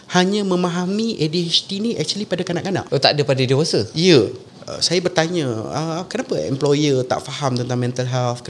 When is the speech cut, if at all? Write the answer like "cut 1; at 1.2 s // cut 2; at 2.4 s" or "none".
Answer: cut 1; at 2.9 s // cut 2; at 4.4 s